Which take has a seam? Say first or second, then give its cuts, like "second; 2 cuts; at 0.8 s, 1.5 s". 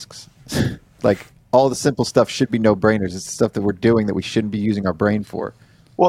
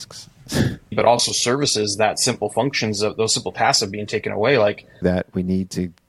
second; 2 cuts; at 0.9 s, 5.0 s